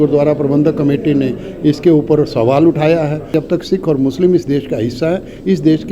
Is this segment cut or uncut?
cut